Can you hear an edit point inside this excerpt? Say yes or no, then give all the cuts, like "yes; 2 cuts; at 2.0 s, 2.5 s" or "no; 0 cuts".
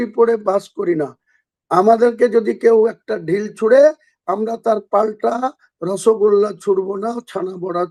no; 0 cuts